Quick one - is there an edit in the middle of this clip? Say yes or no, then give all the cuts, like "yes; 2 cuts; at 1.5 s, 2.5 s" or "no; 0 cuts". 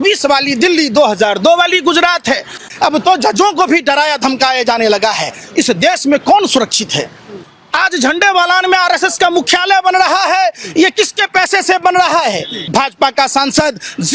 yes; 3 cuts; at 2.6 s, 7.4 s, 12.5 s